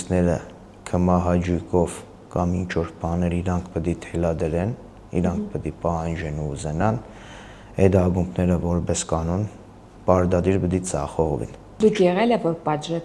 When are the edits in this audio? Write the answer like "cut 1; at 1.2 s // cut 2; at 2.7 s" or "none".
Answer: cut 1; at 11.6 s